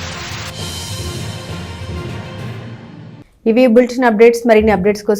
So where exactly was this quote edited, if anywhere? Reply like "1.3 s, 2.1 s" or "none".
none